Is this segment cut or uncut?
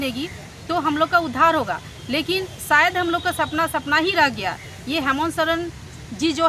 uncut